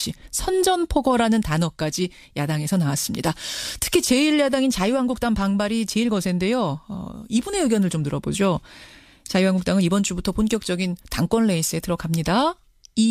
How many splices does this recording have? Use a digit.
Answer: 1